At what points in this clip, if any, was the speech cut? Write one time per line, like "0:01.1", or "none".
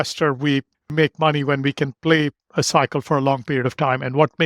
0:00.9